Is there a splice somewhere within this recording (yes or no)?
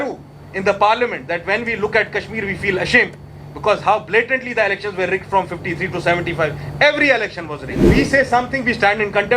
yes